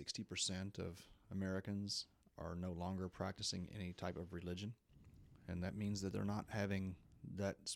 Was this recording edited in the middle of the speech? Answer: no; 0 cuts

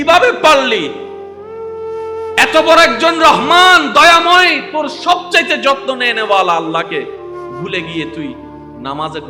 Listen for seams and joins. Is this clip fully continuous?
yes; 0 cuts

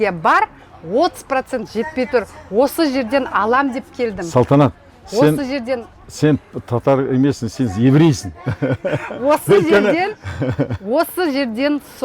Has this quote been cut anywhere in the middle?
no; 0 cuts

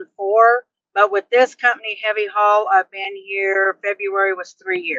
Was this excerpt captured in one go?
yes; 0 cuts

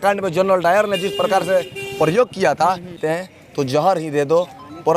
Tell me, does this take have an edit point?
yes; 1 cut; at 3.0 s

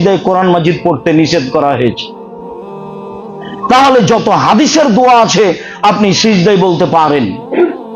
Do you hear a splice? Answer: yes; 2 cuts; at 2.2 s, 3.5 s

